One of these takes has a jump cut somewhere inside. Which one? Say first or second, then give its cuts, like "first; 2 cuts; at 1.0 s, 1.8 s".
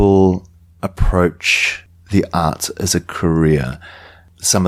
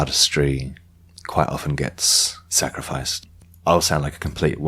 second; 1 cut; at 3.1 s